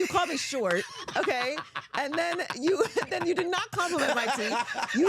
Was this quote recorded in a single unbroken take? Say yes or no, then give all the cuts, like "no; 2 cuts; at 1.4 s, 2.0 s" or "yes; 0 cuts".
yes; 0 cuts